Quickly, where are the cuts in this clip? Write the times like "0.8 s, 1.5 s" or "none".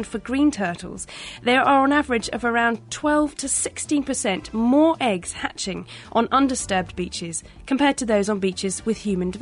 none